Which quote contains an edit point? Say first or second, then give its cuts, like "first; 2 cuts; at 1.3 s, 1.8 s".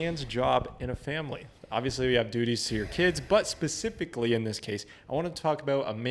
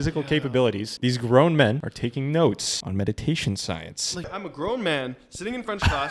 second; 4 cuts; at 0.9 s, 1.9 s, 2.7 s, 4.3 s